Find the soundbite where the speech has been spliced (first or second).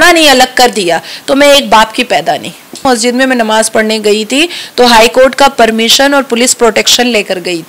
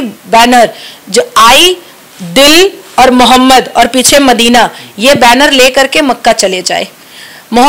first